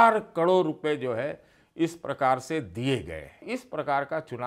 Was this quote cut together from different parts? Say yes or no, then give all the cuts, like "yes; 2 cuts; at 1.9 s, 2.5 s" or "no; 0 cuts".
yes; 1 cut; at 3.4 s